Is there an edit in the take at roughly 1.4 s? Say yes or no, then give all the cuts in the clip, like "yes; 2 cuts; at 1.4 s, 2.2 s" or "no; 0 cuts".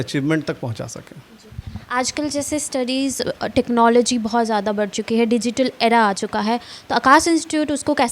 no; 0 cuts